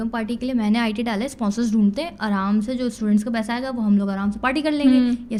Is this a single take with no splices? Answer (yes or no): yes